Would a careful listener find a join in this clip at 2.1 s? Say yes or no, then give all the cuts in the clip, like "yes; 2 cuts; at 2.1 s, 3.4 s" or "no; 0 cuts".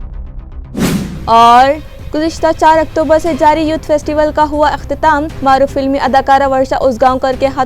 no; 1 cut; at 0.9 s